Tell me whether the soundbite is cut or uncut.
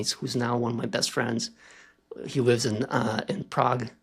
uncut